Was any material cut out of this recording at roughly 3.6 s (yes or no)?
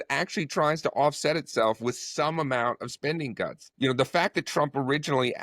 yes